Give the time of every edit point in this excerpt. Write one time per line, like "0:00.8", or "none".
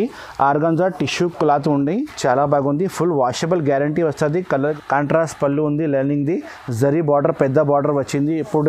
0:04.6